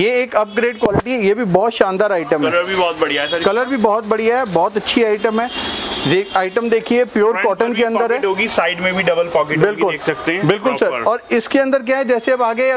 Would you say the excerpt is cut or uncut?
uncut